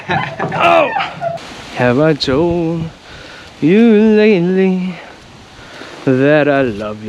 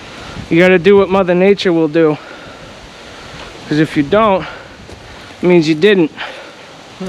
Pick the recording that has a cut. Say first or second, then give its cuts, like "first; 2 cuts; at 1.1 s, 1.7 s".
first; 1 cut; at 1.3 s